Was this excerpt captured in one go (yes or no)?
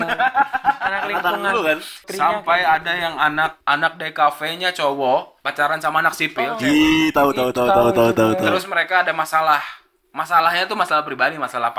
no